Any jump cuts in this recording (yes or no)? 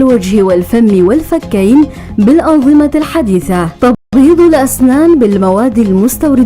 yes